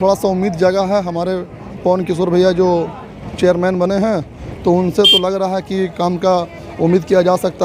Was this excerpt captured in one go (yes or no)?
yes